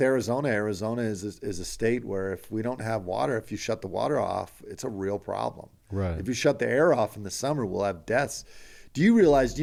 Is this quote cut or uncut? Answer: uncut